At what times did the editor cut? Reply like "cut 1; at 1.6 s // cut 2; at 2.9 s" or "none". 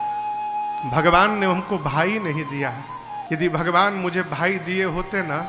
cut 1; at 3.2 s